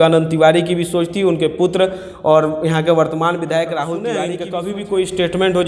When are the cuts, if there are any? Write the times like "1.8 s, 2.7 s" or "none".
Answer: 4.2 s